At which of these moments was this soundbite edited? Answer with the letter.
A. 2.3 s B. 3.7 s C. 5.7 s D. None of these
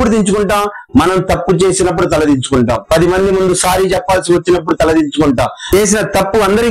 C